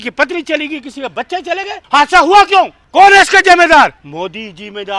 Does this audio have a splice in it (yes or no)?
yes